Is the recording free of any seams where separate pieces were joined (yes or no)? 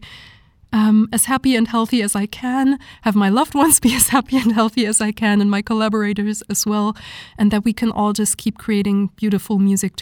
yes